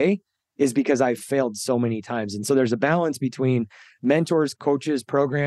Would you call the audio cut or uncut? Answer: cut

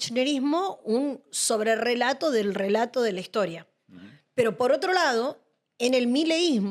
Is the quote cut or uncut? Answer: uncut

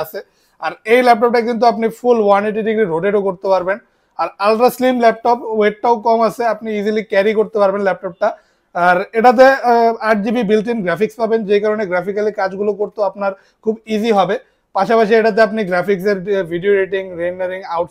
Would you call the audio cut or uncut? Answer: uncut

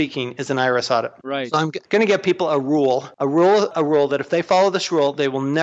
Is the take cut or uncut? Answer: cut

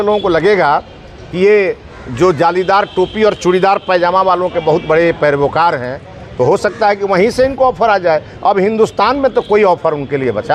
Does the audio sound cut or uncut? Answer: uncut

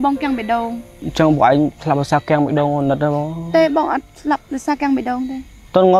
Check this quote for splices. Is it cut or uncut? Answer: cut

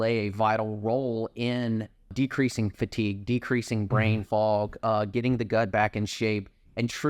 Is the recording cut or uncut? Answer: uncut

